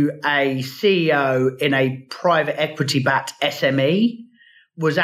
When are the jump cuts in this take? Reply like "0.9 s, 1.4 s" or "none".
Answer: none